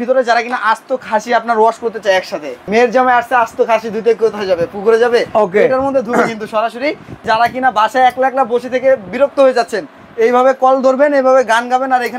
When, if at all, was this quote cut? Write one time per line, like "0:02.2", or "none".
0:02.7
0:07.2